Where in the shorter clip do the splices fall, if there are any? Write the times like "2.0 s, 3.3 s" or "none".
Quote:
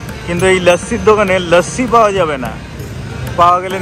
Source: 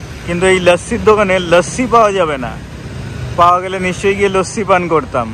none